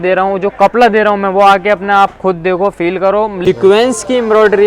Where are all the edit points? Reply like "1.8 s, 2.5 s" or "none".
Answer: 3.4 s